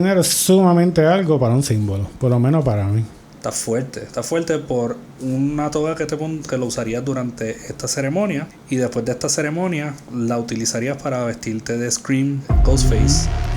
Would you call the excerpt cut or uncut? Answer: cut